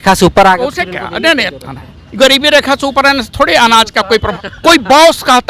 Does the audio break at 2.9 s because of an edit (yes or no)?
no